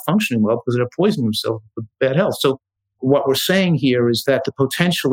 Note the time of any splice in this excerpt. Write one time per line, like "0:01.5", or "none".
0:01.9
0:03.0
0:04.2